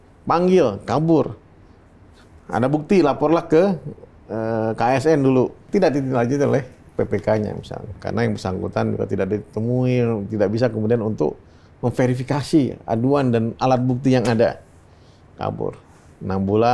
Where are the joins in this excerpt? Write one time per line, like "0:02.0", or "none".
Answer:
0:05.6
0:07.8

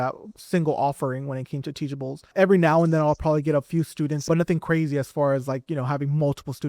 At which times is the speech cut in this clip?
0:02.3
0:04.2

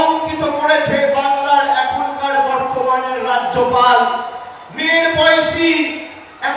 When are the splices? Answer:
none

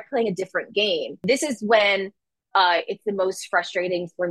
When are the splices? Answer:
0:01.2

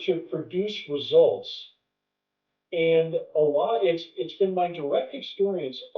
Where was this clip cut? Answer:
none

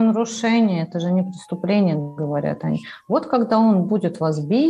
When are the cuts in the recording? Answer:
none

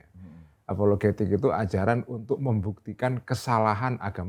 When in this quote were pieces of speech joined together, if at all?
none

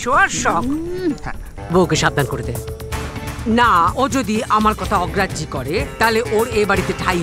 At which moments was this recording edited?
0:01.5

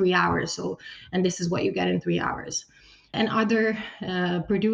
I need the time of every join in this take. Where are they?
0:03.1

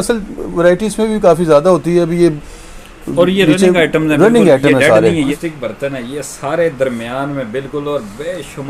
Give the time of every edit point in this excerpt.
0:05.3

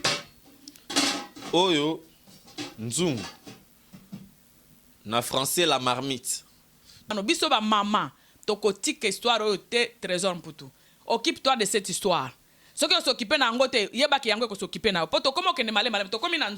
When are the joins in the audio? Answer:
0:07.1

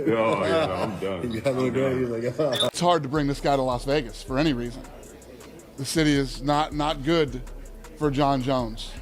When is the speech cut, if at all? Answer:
0:02.7

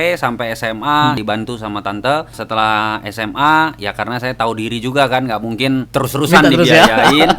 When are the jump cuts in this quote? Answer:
0:01.2
0:02.3
0:05.9

